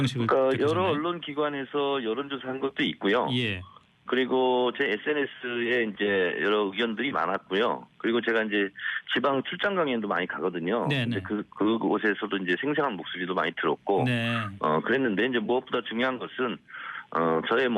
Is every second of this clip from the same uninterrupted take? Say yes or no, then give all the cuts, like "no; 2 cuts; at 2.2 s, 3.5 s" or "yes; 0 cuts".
no; 1 cut; at 5.9 s